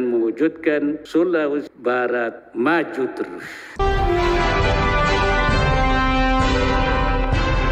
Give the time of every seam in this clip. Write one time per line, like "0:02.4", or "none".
0:03.8